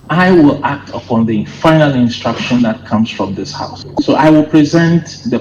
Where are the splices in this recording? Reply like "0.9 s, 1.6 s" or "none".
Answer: none